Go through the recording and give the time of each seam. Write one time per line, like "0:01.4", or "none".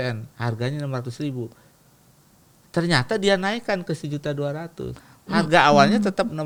none